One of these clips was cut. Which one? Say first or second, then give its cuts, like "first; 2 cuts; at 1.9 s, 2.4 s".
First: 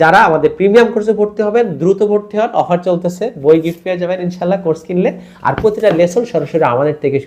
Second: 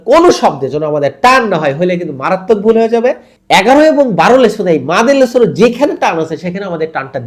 second; 1 cut; at 3.3 s